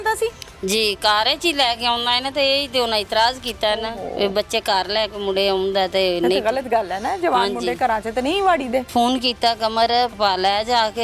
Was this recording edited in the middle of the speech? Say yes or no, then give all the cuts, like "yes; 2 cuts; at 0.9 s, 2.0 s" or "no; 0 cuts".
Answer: yes; 2 cuts; at 8.9 s, 10.1 s